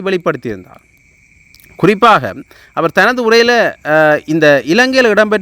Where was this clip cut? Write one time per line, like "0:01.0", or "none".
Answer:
none